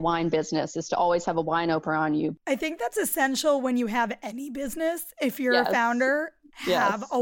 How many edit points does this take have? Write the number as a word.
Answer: one